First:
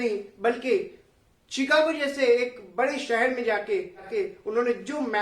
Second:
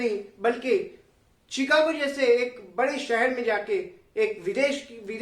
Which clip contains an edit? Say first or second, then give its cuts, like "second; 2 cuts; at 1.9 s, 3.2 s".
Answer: first; 1 cut; at 4.1 s